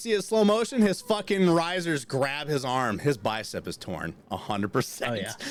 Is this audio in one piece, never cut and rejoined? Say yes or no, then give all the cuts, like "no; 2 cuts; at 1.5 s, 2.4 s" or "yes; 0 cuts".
yes; 0 cuts